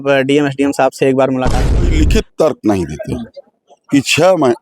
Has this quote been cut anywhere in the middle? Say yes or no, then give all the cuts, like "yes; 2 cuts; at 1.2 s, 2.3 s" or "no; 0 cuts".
yes; 1 cut; at 1.9 s